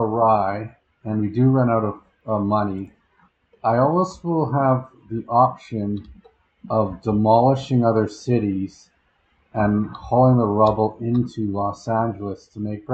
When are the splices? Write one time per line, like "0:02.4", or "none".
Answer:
none